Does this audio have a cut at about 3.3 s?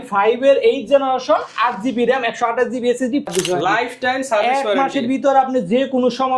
yes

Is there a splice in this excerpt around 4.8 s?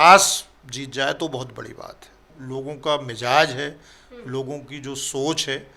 no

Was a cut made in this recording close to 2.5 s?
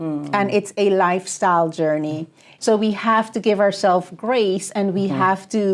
yes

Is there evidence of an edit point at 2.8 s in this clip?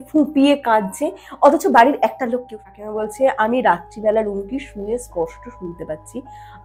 yes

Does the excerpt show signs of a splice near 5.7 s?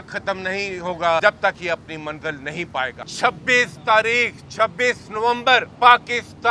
yes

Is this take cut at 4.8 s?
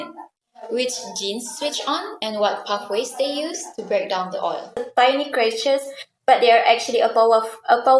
yes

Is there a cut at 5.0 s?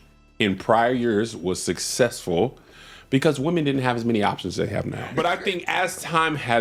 yes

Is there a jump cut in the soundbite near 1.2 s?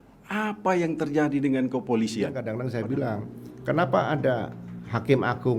no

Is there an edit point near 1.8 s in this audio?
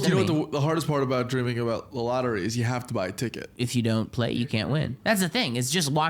no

